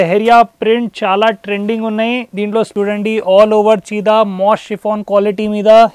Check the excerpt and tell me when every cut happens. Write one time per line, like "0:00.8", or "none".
0:02.7